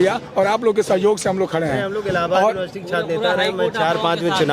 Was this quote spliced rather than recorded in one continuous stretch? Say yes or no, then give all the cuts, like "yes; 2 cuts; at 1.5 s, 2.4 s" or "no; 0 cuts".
no; 0 cuts